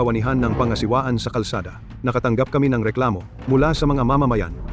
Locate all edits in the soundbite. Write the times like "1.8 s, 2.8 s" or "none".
none